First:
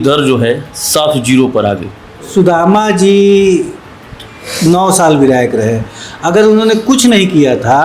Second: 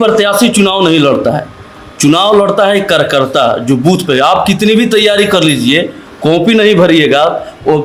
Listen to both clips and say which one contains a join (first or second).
first